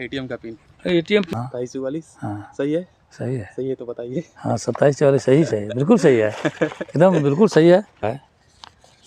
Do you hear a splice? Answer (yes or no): yes